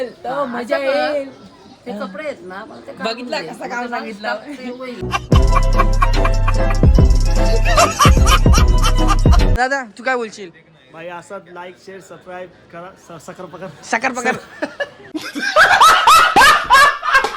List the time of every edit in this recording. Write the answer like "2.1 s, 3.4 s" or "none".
9.6 s

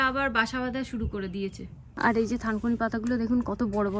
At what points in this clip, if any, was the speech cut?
2.0 s

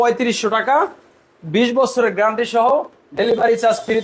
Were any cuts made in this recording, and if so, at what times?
none

